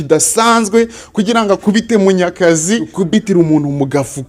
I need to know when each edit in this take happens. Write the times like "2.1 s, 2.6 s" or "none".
2.9 s